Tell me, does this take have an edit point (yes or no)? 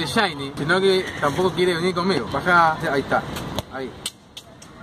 yes